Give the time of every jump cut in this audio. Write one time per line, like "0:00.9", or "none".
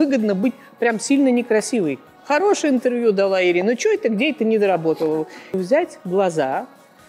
0:02.1
0:05.6